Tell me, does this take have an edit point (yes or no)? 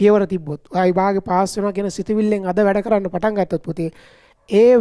no